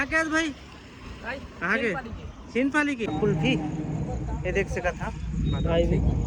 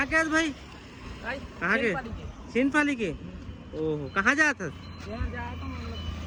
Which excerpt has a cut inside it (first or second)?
first